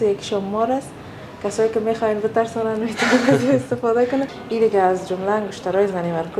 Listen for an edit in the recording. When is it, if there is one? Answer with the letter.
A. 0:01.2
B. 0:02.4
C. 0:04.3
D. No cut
C